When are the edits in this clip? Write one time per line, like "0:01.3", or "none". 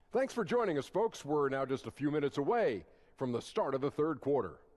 none